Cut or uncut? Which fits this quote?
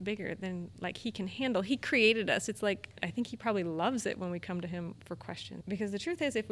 cut